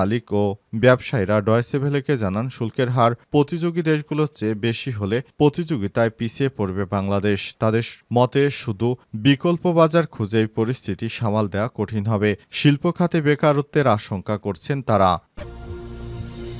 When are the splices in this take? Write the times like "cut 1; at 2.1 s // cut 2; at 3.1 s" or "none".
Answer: cut 1; at 15.3 s